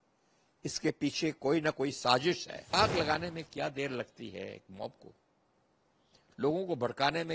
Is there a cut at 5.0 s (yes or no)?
no